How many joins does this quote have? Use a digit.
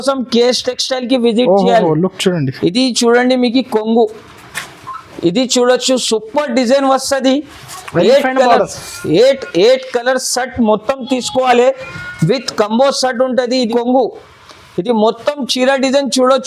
1